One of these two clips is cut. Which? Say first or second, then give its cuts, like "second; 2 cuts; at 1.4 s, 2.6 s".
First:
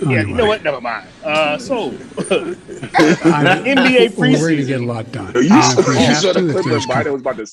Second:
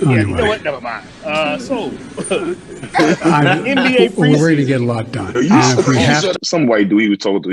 second; 1 cut; at 6.3 s